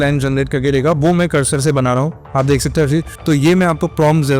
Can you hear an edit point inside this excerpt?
yes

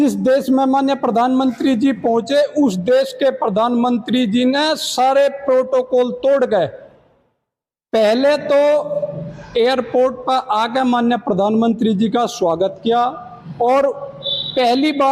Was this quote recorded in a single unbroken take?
yes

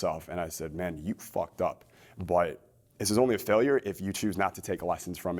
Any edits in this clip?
no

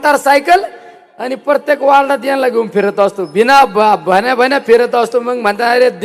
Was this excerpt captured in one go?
yes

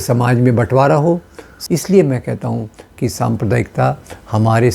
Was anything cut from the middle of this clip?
yes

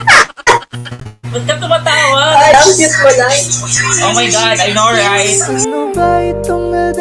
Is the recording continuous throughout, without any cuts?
no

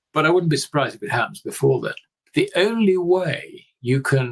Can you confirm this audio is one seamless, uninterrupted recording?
no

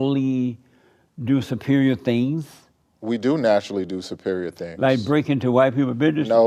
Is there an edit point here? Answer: no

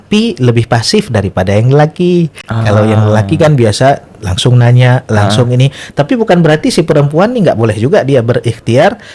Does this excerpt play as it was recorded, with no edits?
yes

